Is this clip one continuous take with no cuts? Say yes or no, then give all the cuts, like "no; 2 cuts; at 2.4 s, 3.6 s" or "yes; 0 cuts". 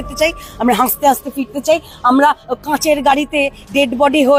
yes; 0 cuts